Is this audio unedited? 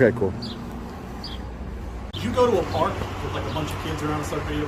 yes; 0 cuts

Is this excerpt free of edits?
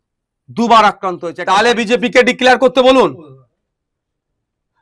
no; 1 cut; at 1.3 s

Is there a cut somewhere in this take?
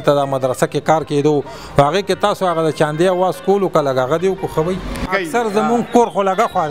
yes; 1 cut; at 5.0 s

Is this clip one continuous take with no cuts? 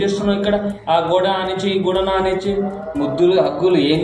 yes; 0 cuts

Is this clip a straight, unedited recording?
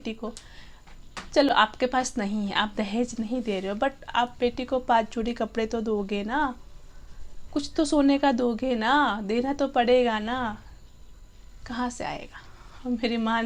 yes; 0 cuts

